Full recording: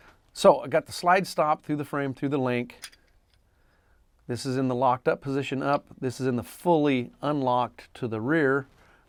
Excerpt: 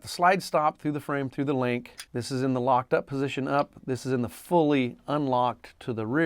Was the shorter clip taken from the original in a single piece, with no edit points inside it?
no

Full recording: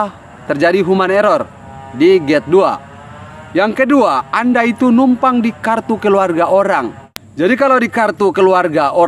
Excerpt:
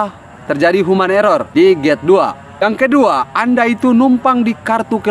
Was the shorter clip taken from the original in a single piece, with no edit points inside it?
no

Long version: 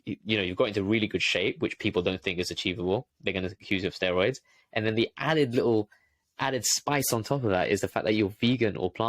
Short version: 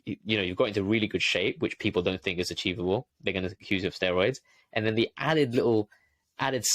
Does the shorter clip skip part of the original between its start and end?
no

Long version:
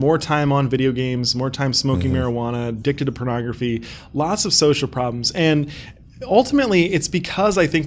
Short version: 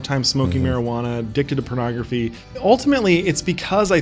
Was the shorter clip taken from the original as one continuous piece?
no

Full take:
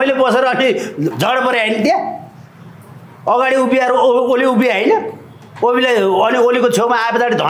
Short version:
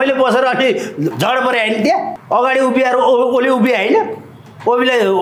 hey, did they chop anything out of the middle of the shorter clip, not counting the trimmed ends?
yes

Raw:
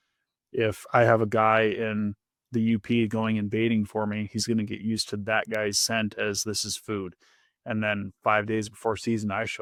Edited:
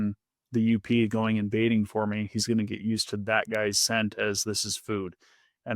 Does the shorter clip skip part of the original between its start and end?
no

